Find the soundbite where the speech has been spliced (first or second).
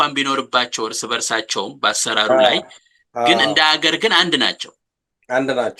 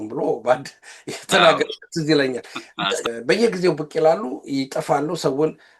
second